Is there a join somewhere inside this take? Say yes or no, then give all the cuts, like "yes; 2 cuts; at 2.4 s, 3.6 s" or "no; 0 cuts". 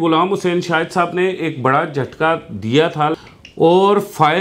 yes; 1 cut; at 3.2 s